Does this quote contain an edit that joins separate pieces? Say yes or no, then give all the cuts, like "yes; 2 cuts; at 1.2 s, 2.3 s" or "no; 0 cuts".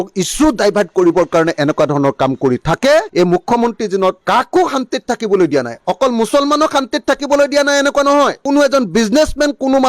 yes; 1 cut; at 8.4 s